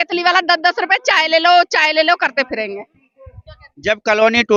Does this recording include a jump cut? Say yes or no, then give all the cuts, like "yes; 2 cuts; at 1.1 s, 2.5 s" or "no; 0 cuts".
no; 0 cuts